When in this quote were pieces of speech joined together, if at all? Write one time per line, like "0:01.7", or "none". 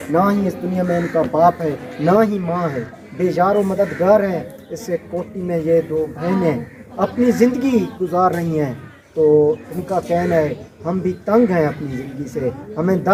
none